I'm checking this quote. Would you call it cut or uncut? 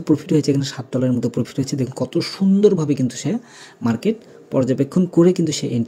uncut